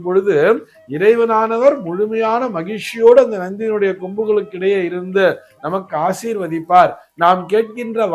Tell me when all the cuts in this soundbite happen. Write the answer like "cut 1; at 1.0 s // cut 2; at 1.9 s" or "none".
none